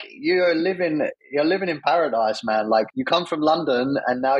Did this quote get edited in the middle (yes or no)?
yes